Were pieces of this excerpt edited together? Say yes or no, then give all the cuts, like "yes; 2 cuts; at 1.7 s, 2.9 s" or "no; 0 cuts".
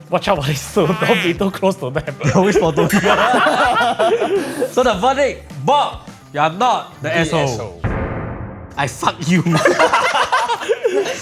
no; 0 cuts